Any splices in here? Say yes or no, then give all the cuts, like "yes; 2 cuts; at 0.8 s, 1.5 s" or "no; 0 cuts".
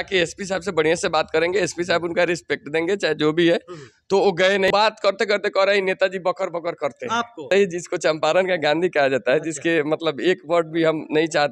yes; 2 cuts; at 4.7 s, 7.5 s